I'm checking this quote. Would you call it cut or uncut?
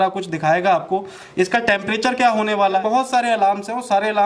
cut